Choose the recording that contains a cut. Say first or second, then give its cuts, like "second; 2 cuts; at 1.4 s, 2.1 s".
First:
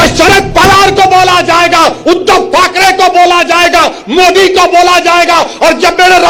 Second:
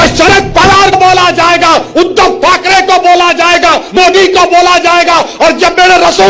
second; 2 cuts; at 0.9 s, 3.9 s